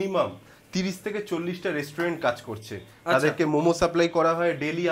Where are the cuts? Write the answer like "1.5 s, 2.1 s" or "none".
none